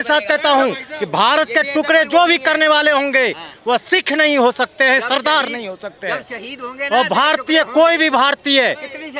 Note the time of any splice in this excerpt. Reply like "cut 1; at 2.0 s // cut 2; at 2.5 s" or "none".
none